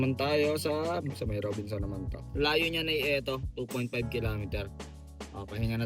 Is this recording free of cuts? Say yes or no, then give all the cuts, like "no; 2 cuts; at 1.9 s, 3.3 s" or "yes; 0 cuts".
no; 1 cut; at 2.3 s